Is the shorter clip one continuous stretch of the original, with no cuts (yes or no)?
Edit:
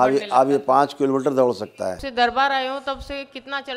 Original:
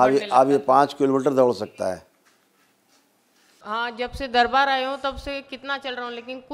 no